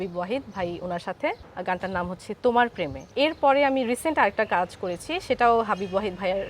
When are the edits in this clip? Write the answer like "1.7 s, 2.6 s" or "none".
1.5 s, 3.1 s